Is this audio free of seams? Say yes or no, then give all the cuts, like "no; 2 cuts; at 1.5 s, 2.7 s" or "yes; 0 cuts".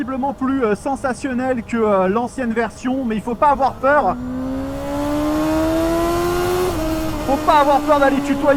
yes; 0 cuts